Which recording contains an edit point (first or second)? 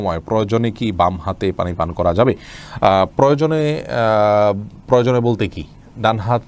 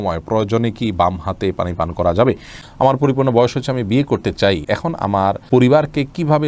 second